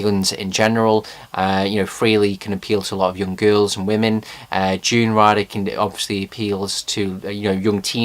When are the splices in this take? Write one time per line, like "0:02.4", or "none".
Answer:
0:01.2